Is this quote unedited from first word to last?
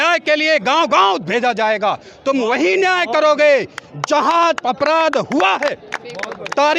yes; 0 cuts

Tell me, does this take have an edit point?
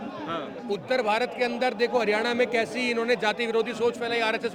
no; 0 cuts

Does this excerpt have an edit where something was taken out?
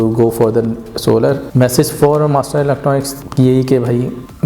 yes; 2 cuts; at 1.4 s, 3.2 s

